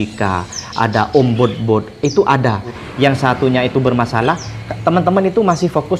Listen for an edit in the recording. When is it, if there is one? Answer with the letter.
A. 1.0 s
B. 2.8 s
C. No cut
B